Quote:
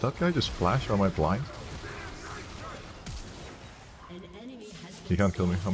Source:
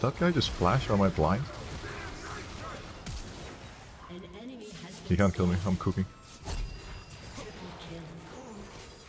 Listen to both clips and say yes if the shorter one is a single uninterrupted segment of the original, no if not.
yes